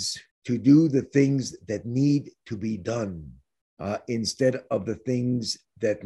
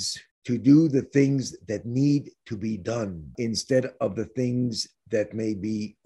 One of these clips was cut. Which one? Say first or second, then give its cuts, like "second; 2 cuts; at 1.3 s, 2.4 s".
second; 1 cut; at 3.3 s